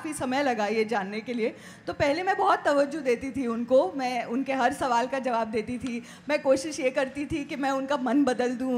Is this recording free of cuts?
yes; 0 cuts

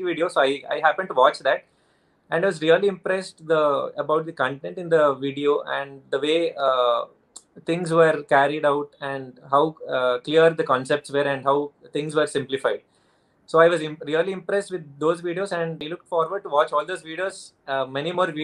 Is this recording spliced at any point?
yes; 1 cut; at 15.8 s

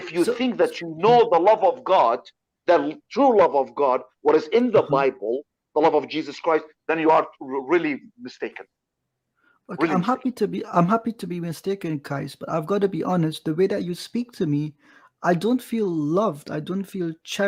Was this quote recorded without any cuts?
yes; 0 cuts

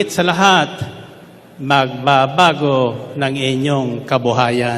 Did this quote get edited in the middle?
no; 0 cuts

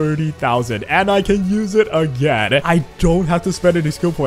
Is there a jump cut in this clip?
yes; 1 cut; at 2.6 s

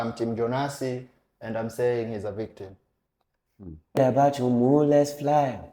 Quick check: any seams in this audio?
yes; 1 cut; at 4.0 s

